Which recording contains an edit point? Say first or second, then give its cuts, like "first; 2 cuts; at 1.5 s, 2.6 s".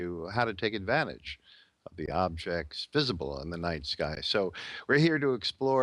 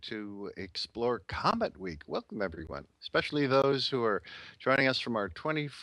second; 1 cut; at 3.3 s